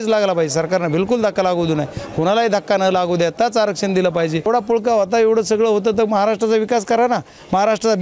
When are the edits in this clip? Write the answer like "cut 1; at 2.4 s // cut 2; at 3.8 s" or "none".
cut 1; at 4.5 s